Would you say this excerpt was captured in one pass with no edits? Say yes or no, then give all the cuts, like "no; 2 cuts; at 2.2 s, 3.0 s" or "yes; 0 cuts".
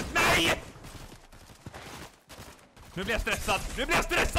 yes; 0 cuts